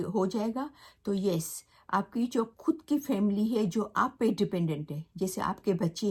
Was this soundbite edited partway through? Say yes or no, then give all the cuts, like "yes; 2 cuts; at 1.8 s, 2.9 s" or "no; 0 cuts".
no; 0 cuts